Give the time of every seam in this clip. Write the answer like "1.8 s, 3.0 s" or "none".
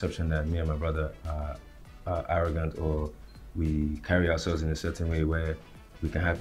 none